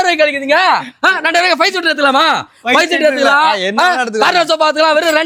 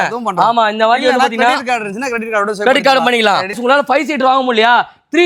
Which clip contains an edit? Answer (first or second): second